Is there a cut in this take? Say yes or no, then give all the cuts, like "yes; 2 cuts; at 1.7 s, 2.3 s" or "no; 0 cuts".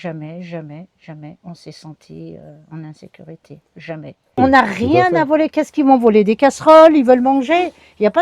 yes; 1 cut; at 4.4 s